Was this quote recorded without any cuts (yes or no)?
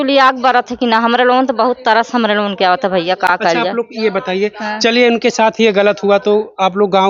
yes